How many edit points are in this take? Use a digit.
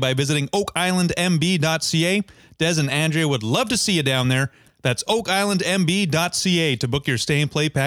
1